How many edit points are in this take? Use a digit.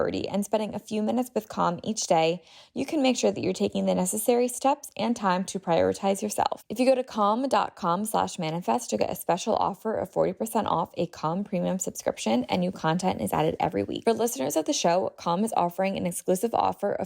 2